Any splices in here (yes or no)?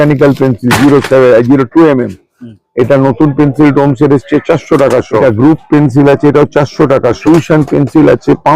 yes